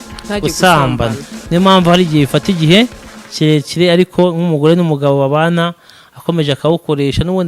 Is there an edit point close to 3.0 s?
no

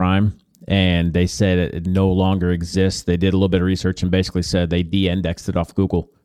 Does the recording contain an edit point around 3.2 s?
no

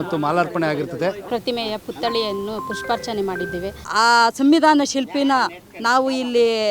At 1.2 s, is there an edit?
yes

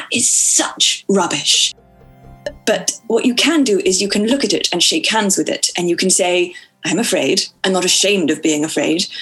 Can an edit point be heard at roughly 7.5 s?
yes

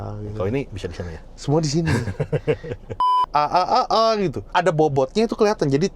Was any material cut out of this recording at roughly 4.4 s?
yes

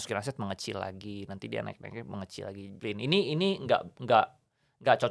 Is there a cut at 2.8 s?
yes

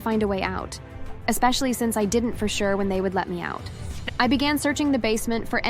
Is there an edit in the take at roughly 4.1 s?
yes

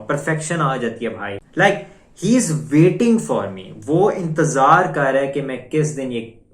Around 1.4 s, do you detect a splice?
yes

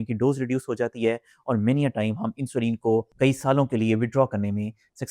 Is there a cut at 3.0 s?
no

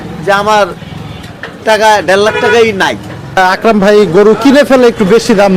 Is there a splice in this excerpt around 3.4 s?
yes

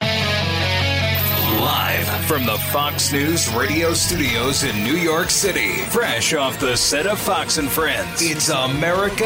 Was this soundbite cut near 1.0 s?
yes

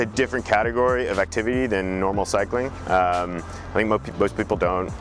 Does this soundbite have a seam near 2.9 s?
no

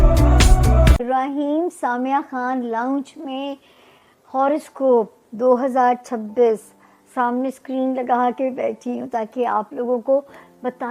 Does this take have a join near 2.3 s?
no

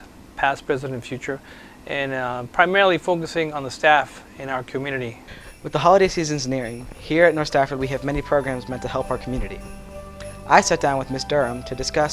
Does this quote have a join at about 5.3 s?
yes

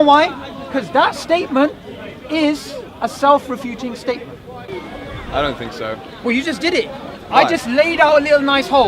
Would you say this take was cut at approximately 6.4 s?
no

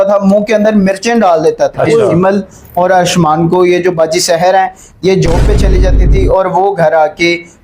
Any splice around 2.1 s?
yes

